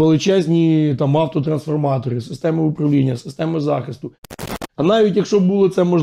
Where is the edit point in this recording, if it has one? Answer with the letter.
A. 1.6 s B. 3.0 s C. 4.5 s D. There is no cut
C